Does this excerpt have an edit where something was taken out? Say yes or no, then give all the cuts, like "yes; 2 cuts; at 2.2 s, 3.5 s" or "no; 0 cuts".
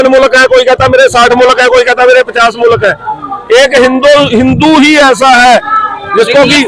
no; 0 cuts